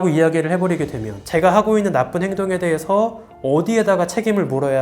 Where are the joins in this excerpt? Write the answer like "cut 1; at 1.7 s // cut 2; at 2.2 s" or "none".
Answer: cut 1; at 1.2 s